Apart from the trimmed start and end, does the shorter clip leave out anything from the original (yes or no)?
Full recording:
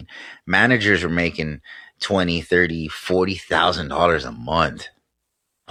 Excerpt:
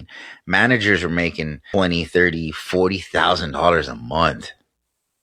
yes